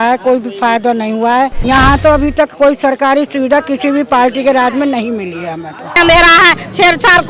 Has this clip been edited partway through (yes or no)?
yes